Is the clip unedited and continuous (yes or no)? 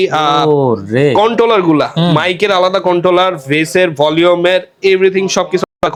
yes